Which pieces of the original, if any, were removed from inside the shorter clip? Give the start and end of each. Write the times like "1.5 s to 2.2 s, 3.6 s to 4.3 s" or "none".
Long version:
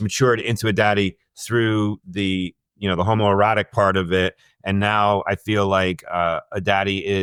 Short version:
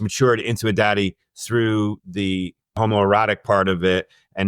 2.8 s to 3.1 s